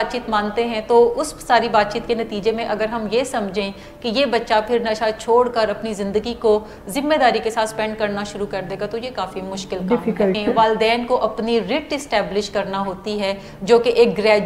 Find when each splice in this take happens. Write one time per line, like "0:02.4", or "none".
0:10.4